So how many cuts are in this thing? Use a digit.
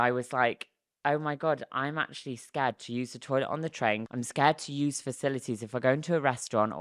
1